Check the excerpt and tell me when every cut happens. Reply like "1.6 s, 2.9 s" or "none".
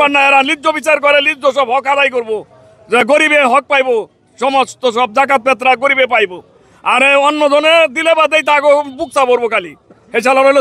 none